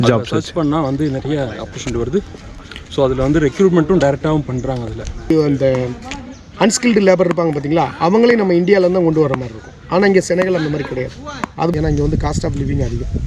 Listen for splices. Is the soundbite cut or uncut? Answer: cut